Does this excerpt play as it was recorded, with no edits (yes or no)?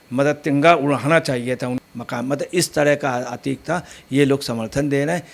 no